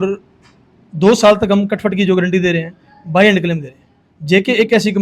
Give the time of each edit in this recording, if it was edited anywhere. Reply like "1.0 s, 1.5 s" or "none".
none